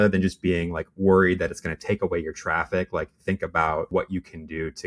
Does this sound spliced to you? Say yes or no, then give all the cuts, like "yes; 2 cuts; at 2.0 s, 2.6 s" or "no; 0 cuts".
yes; 1 cut; at 3.9 s